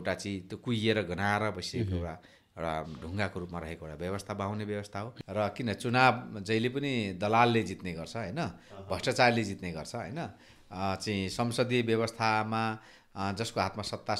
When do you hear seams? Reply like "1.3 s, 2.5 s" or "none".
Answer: 5.1 s